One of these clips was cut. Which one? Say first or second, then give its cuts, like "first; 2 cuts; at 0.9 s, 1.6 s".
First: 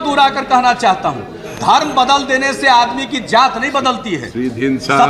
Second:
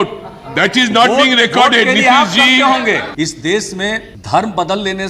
second; 2 cuts; at 3.1 s, 4.1 s